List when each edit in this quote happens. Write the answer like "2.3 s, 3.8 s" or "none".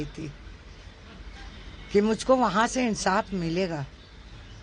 none